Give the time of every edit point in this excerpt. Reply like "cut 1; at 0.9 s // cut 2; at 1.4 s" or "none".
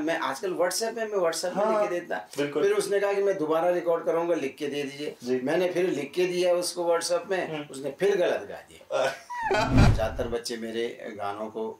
cut 1; at 9.9 s